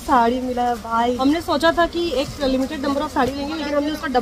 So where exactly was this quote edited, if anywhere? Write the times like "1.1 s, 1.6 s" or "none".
1.2 s